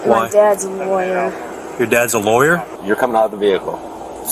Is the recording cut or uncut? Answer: cut